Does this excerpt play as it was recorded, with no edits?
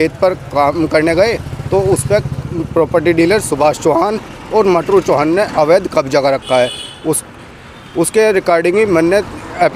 yes; 0 cuts

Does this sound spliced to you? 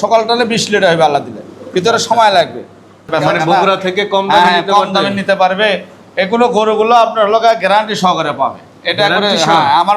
yes; 1 cut; at 3.1 s

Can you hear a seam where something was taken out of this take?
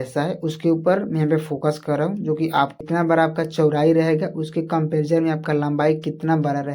yes; 1 cut; at 2.8 s

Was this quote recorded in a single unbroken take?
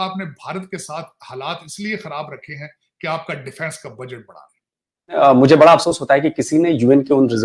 no; 1 cut; at 5.2 s

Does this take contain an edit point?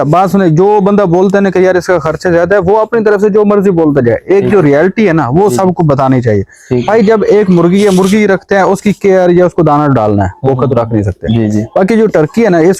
no; 0 cuts

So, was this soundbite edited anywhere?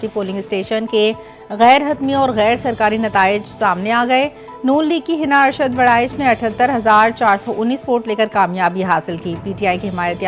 no; 0 cuts

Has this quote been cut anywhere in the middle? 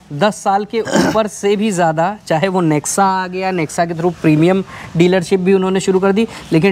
no; 0 cuts

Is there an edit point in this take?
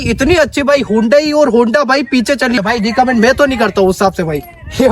yes; 1 cut; at 2.6 s

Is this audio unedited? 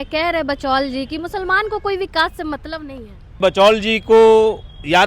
no; 1 cut; at 3.4 s

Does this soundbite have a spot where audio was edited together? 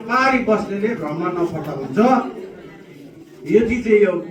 no; 0 cuts

